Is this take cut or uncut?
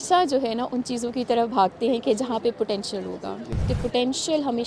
cut